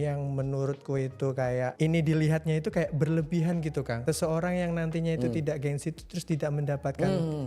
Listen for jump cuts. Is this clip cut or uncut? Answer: cut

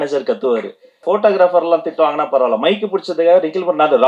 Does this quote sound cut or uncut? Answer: cut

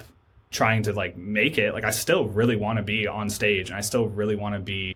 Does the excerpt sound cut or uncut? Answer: uncut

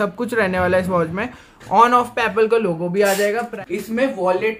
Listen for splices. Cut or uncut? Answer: cut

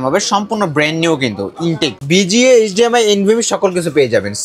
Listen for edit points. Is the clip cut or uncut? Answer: cut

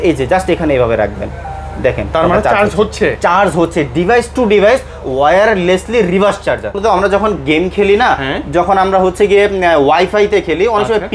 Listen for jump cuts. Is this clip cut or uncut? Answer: cut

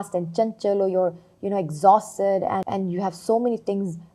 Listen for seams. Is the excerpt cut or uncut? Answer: cut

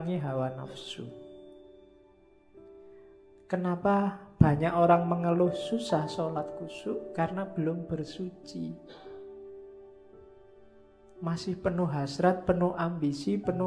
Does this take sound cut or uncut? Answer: uncut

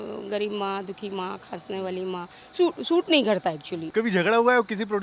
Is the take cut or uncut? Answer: cut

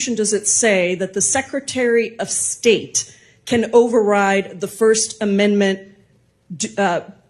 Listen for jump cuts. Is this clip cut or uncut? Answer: uncut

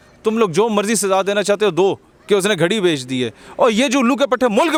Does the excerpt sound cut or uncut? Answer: uncut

